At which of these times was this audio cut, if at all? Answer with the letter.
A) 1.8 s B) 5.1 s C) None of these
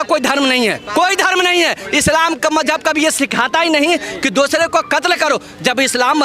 A